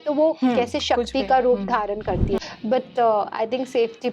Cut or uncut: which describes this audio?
cut